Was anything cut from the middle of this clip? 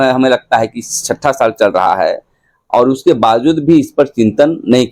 no; 0 cuts

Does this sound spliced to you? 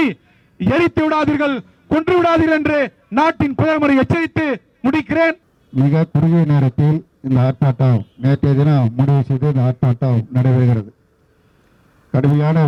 no; 0 cuts

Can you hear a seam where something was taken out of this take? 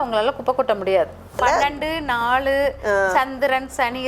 yes; 1 cut; at 1.4 s

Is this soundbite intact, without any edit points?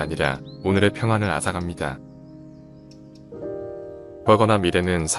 no; 2 cuts; at 1.9 s, 4.2 s

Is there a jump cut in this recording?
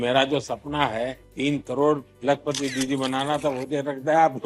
yes; 2 cuts; at 1.2 s, 2.1 s

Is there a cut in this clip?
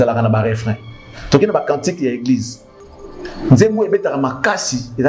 no; 0 cuts

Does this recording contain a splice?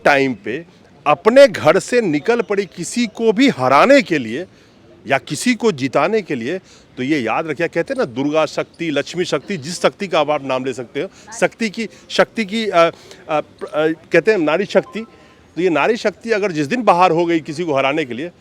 no; 0 cuts

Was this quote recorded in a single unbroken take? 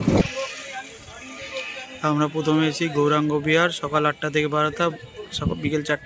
yes; 0 cuts

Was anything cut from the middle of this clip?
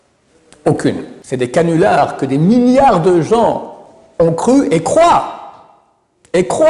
yes; 1 cut; at 1.1 s

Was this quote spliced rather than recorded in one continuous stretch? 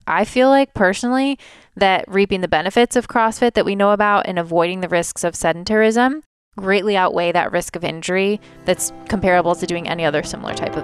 no; 0 cuts

